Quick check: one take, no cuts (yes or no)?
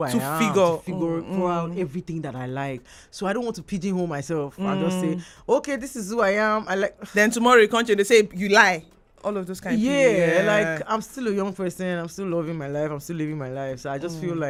yes